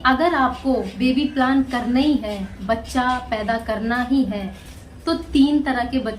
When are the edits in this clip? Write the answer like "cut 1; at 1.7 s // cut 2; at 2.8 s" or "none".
cut 1; at 0.9 s // cut 2; at 2.5 s